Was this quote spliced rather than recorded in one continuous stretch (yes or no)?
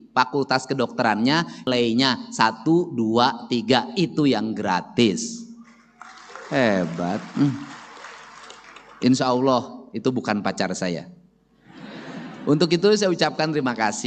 no